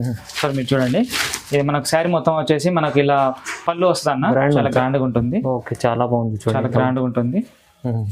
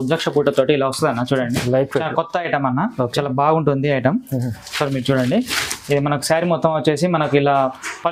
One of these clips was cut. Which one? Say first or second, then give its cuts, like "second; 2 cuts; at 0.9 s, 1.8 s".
first; 1 cut; at 4.7 s